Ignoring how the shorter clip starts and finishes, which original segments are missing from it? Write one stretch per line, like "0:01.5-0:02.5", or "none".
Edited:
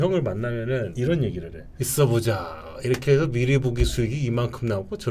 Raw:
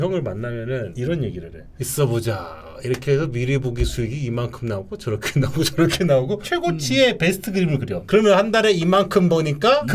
none